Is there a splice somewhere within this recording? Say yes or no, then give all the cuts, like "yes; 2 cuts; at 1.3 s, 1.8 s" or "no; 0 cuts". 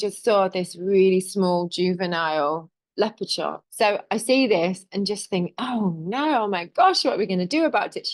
yes; 1 cut; at 3.6 s